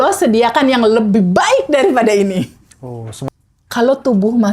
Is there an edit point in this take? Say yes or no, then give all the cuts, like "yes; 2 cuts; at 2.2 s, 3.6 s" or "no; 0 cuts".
yes; 1 cut; at 3.3 s